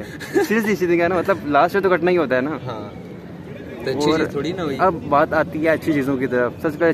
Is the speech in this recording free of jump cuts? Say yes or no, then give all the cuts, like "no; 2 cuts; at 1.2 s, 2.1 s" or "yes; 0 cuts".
yes; 0 cuts